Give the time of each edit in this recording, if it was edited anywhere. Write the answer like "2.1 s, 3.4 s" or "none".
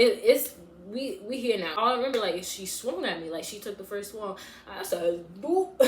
1.7 s